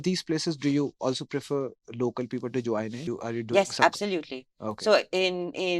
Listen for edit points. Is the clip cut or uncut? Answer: cut